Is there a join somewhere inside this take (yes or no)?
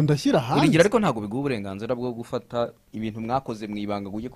yes